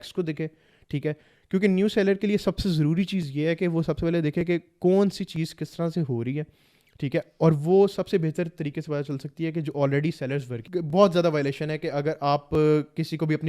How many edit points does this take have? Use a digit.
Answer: 1